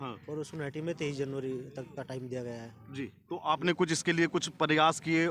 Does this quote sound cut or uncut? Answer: uncut